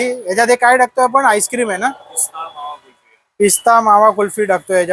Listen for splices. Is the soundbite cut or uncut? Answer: uncut